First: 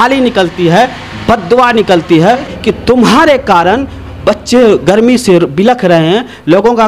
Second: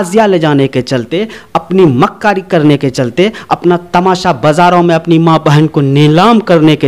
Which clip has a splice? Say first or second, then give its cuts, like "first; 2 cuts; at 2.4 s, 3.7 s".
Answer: first; 1 cut; at 2.5 s